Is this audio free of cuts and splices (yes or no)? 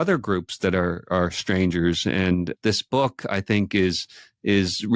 no